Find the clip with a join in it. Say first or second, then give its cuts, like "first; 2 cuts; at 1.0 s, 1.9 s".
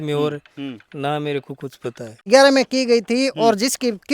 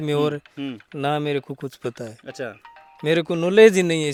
first; 1 cut; at 2.3 s